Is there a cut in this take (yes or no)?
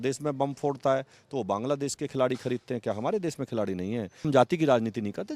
yes